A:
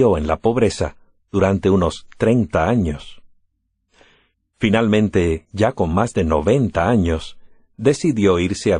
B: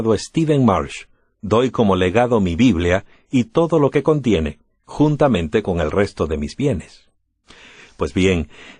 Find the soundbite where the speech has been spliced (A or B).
A